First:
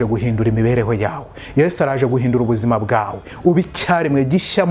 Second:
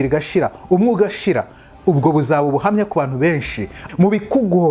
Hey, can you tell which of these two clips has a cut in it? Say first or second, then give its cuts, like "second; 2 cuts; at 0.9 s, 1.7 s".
second; 1 cut; at 3.7 s